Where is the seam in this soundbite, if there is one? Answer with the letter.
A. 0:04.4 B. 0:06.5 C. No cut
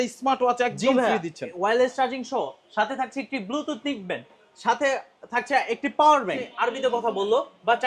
B